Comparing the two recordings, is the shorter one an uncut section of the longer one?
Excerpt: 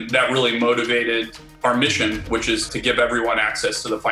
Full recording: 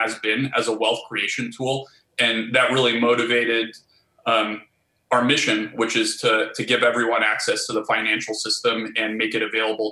no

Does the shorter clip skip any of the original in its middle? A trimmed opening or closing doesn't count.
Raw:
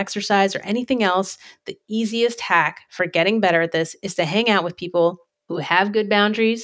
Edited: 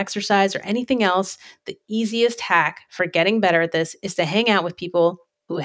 no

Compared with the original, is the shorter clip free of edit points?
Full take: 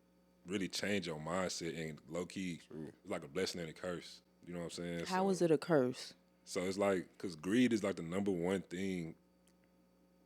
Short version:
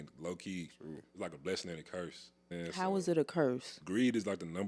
no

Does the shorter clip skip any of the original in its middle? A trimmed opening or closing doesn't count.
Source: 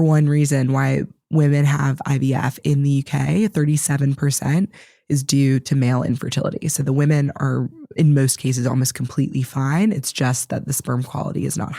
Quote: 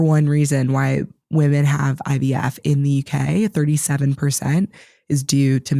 no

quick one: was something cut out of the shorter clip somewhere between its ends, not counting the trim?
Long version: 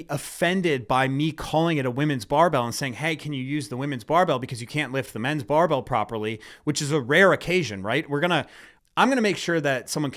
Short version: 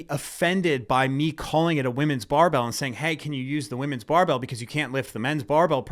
no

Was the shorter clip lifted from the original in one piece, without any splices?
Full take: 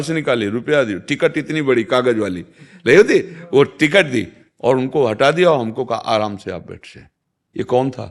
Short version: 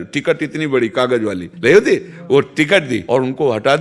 no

